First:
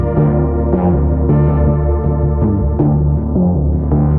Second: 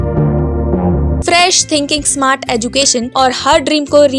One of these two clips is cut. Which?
second; 2 cuts; at 1.2 s, 3.1 s

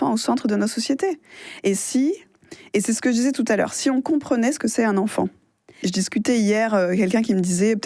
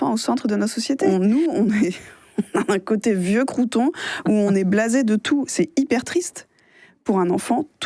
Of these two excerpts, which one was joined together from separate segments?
second; 1 cut; at 1.0 s

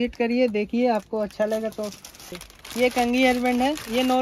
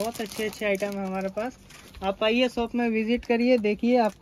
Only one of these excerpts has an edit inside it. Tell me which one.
first; 1 cut; at 2.2 s

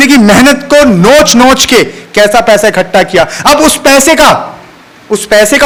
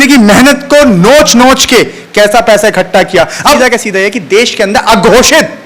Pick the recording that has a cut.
second; 1 cut; at 3.6 s

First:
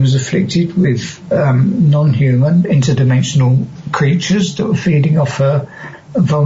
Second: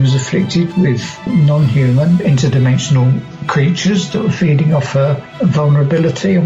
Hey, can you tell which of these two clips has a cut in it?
second; 2 cuts; at 1.3 s, 5.2 s

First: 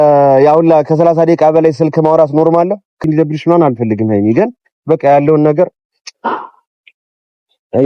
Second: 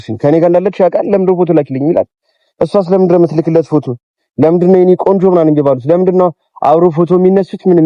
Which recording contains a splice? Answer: first; 1 cut; at 3.0 s

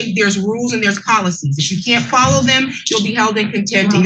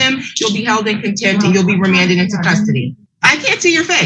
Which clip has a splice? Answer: second; 1 cut; at 3.0 s

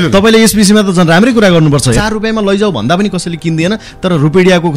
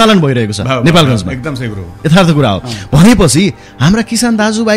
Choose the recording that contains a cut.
first; 1 cut; at 2.0 s

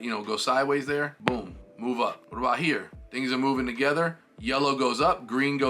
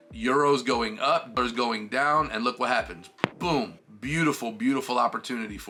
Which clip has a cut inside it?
first; 2 cuts; at 1.2 s, 2.2 s

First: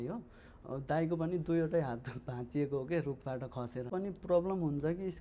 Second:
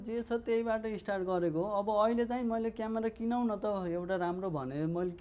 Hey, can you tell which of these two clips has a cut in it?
first; 1 cut; at 3.9 s

